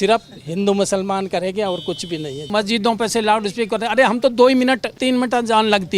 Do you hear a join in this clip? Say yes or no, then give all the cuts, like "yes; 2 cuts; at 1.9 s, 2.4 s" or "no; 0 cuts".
yes; 2 cuts; at 2.5 s, 5.0 s